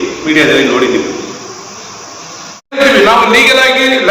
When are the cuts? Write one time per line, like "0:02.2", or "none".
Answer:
0:02.7